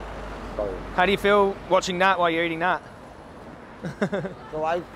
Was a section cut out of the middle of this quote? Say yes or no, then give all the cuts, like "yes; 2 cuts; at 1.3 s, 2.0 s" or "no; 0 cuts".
no; 0 cuts